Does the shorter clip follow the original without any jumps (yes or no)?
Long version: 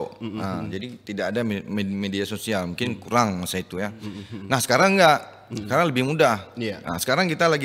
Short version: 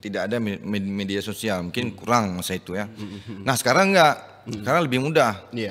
yes